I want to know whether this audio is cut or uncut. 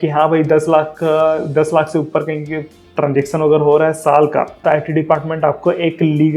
cut